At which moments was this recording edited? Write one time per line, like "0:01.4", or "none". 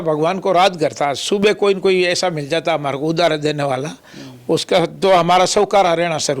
none